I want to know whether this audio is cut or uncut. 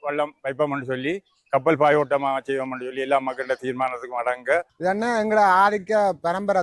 cut